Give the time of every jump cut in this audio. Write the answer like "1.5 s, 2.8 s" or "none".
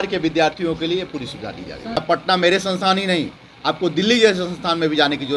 2.0 s